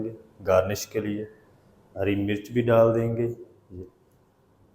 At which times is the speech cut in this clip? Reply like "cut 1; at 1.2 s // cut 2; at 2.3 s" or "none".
cut 1; at 1.8 s